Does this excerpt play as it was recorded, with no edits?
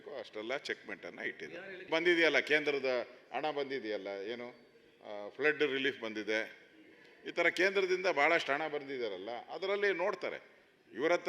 no; 1 cut; at 1.9 s

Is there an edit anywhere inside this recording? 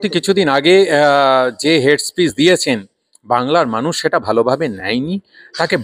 no; 0 cuts

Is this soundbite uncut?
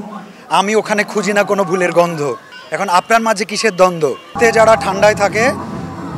no; 1 cut; at 4.3 s

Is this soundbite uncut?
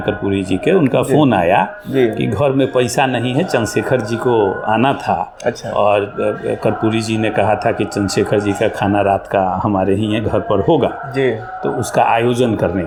yes; 0 cuts

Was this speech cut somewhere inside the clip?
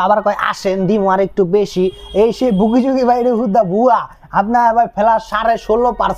no; 0 cuts

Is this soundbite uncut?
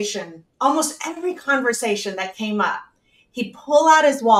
yes; 0 cuts

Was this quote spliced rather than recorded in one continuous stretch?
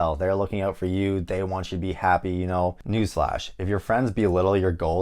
yes; 1 cut; at 2.8 s

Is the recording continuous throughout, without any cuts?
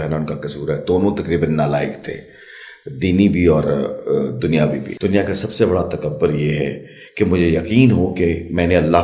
no; 1 cut; at 4.9 s

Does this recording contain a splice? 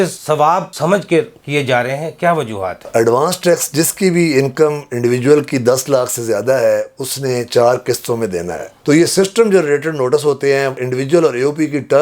yes; 2 cuts; at 2.8 s, 8.7 s

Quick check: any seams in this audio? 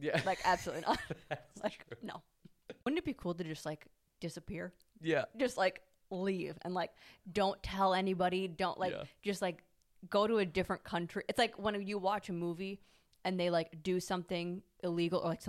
yes; 1 cut; at 2.9 s

